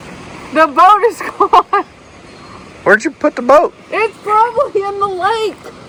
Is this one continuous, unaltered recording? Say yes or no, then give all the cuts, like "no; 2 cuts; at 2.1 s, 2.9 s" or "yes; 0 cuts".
yes; 0 cuts